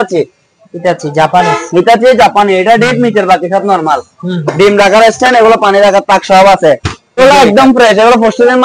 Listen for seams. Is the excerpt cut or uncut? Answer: cut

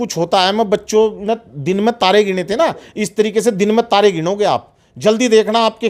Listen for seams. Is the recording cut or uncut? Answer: uncut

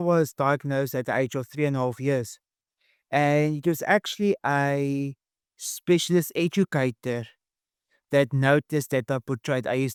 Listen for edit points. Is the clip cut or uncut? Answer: uncut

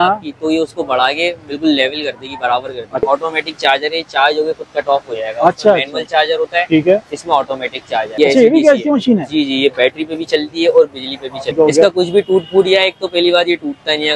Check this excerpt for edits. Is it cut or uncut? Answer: cut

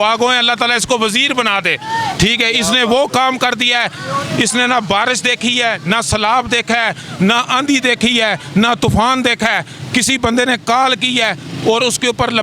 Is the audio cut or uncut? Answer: uncut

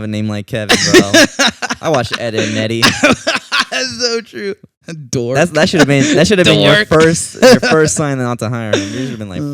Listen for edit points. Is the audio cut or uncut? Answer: uncut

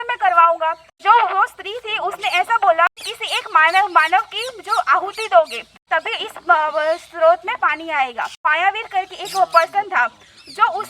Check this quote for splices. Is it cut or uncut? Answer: cut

